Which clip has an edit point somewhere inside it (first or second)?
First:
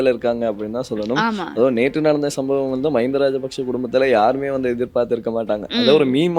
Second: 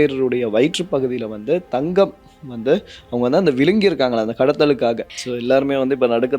second